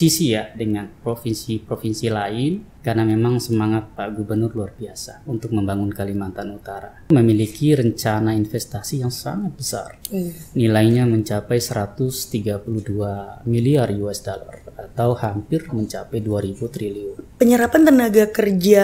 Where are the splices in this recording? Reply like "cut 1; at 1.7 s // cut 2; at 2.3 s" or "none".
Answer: cut 1; at 2.7 s // cut 2; at 7.1 s // cut 3; at 17.3 s